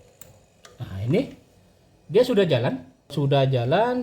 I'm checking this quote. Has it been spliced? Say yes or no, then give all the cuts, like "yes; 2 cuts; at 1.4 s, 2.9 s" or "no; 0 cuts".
yes; 1 cut; at 3.1 s